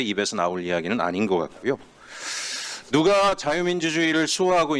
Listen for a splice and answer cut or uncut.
uncut